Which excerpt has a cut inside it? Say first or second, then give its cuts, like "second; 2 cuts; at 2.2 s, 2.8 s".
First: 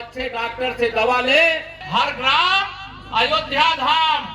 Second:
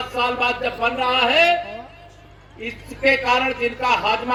first; 1 cut; at 1.8 s